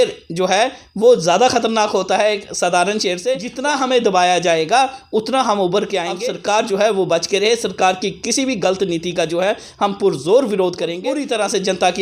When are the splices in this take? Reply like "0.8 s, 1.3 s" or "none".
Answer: 3.5 s, 6.2 s, 11.1 s